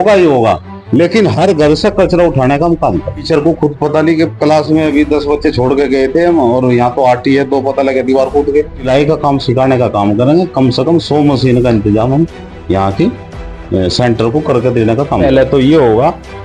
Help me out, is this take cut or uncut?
cut